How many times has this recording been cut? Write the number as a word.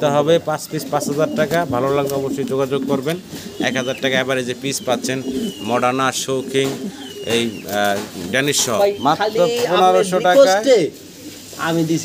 one